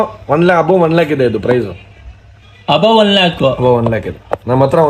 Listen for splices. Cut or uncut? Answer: uncut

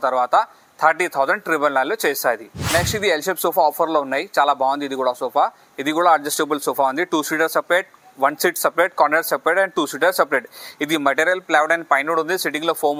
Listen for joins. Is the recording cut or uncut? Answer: uncut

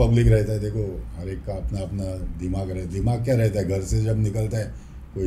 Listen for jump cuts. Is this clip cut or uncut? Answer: uncut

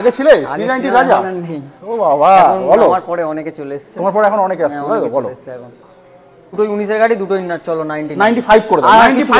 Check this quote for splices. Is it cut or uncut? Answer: cut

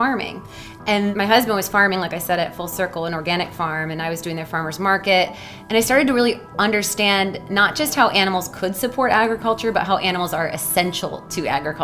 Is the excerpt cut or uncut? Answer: cut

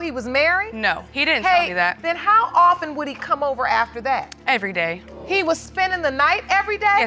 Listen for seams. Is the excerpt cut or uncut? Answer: cut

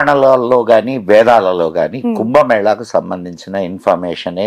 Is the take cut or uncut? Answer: uncut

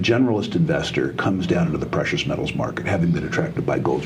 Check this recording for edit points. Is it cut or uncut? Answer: uncut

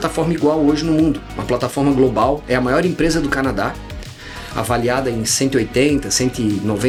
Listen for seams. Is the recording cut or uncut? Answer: uncut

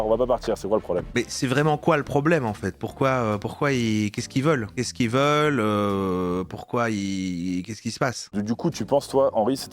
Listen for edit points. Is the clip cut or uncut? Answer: cut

